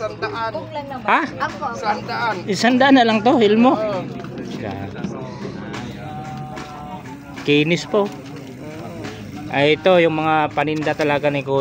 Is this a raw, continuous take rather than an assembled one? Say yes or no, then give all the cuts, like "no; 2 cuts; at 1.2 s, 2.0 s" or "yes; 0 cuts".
yes; 0 cuts